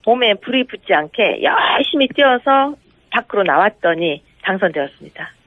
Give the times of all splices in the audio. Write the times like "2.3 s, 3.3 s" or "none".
4.5 s